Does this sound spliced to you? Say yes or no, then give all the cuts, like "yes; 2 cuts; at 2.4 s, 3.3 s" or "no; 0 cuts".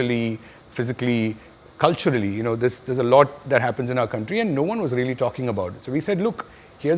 no; 0 cuts